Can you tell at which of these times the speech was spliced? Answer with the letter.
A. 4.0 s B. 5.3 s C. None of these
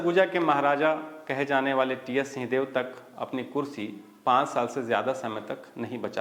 C